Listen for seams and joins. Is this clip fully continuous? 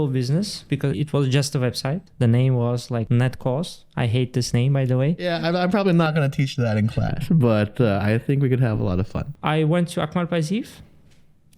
no; 5 cuts; at 0.9 s, 2.1 s, 3.0 s, 5.2 s, 9.3 s

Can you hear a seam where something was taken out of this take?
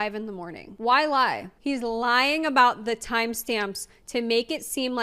yes; 1 cut; at 1.5 s

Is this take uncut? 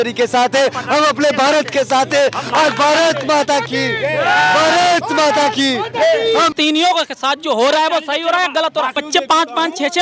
no; 2 cuts; at 6.5 s, 9.0 s

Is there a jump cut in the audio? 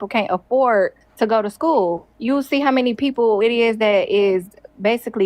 yes; 2 cuts; at 1.0 s, 2.1 s

